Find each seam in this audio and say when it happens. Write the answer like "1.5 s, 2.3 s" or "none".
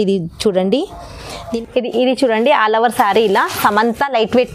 1.6 s